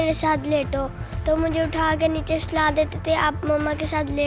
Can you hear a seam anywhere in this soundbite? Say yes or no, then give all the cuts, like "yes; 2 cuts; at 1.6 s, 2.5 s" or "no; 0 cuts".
no; 0 cuts